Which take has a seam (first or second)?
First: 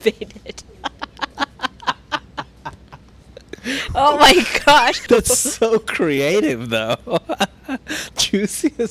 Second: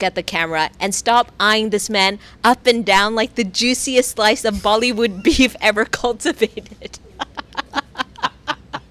first